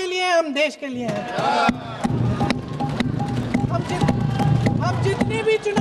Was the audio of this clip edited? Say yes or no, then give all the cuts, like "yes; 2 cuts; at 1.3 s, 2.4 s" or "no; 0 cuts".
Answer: no; 0 cuts